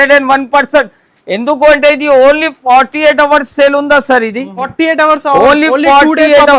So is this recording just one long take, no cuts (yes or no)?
no